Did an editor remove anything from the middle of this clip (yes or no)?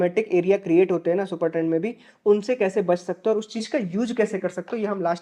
no